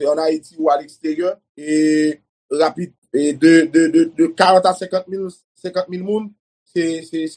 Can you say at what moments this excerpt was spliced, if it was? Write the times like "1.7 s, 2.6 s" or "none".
1.5 s, 2.9 s